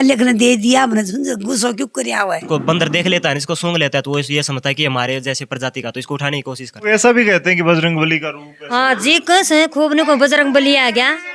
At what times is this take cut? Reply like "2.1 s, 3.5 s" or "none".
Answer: 2.4 s, 6.8 s